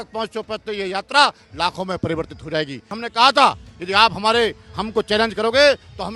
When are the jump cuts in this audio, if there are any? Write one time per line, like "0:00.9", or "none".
0:02.9